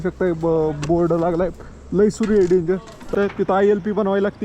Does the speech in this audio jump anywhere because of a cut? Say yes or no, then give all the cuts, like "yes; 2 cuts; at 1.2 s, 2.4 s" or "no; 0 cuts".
yes; 1 cut; at 3.4 s